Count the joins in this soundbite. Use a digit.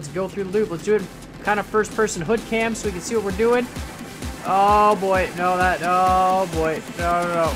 0